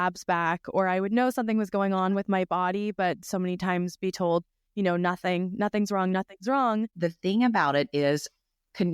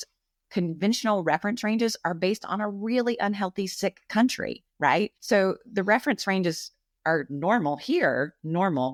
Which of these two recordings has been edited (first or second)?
first